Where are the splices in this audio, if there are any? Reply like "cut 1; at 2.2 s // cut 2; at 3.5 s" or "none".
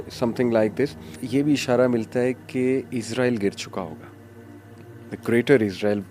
cut 1; at 1.2 s